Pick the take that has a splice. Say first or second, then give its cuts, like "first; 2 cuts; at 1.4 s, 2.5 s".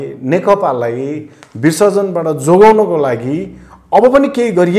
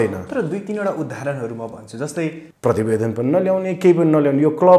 second; 1 cut; at 2.5 s